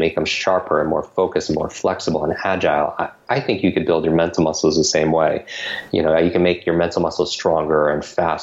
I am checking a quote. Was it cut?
no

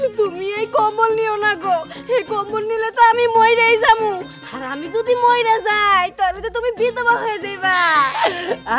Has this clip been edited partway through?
no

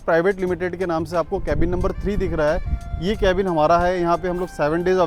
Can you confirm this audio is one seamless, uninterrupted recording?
yes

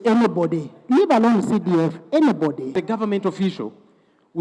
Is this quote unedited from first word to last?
no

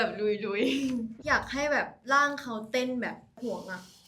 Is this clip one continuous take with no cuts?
no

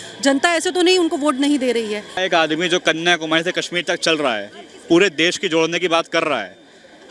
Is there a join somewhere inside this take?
yes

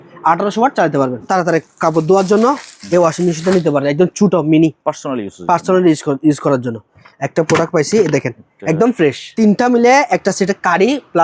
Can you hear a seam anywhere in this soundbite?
yes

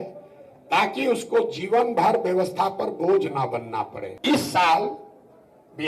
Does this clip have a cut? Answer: yes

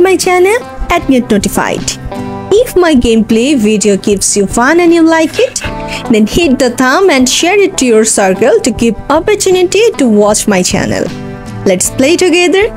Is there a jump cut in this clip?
no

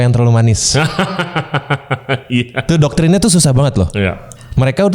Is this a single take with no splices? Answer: yes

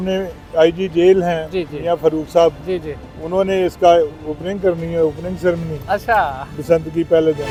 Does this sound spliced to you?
no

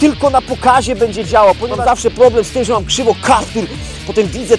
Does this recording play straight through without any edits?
no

